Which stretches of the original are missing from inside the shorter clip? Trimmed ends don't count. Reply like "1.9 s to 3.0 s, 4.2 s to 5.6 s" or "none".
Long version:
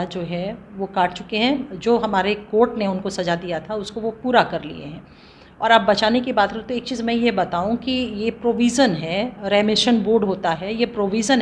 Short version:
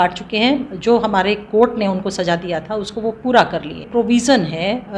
4.9 s to 8.4 s